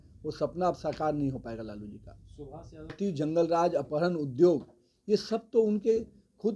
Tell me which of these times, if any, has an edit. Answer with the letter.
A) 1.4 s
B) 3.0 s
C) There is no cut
B